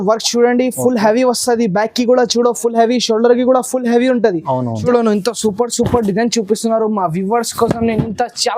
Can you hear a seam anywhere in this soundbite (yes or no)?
yes